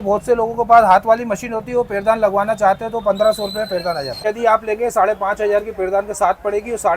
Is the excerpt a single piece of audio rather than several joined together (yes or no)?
no